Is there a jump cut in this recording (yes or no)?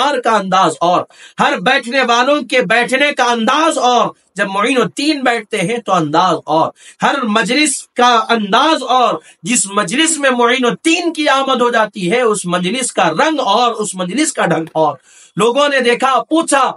no